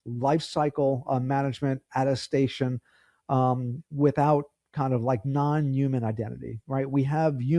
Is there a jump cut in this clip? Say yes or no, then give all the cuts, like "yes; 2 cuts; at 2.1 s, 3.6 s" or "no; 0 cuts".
no; 0 cuts